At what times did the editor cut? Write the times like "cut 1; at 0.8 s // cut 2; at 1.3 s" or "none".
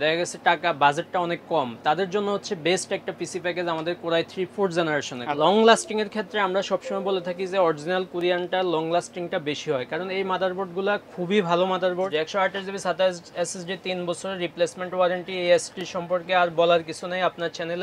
cut 1; at 5.2 s // cut 2; at 12.1 s

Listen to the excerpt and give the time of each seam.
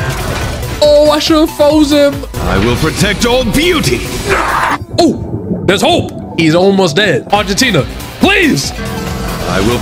cut 1; at 7.2 s

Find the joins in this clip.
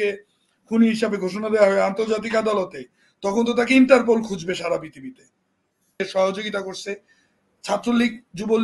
cut 1; at 6.0 s

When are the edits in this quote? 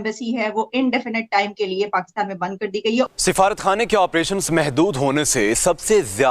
cut 1; at 3.1 s

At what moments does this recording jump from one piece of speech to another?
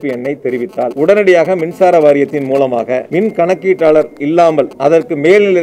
cut 1; at 0.9 s // cut 2; at 3.1 s // cut 3; at 4.7 s

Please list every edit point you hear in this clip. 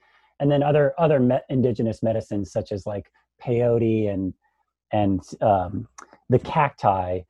none

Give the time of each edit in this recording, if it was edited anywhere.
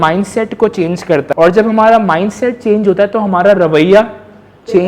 cut 1; at 1.3 s

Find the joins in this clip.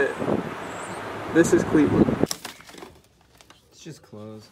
cut 1; at 2.4 s

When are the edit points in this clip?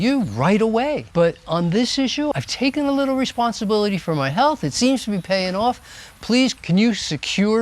cut 1; at 1.0 s // cut 2; at 2.3 s // cut 3; at 6.6 s

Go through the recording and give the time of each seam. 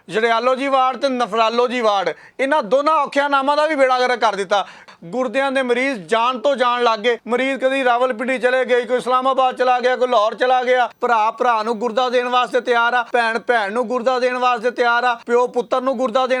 cut 1; at 2.2 s // cut 2; at 4.9 s // cut 3; at 7.2 s // cut 4; at 11.0 s // cut 5; at 13.1 s // cut 6; at 15.2 s

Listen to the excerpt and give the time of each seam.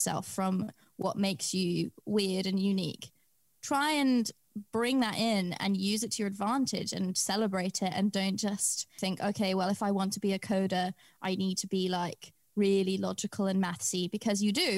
none

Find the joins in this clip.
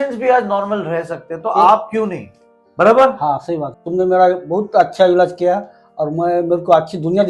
cut 1; at 3.8 s

